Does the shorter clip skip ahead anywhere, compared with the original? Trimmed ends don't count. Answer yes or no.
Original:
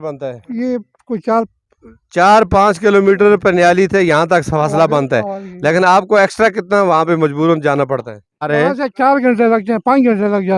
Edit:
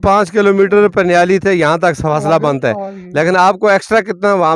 no